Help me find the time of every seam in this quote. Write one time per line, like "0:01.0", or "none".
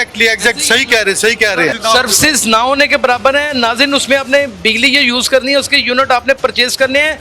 0:01.8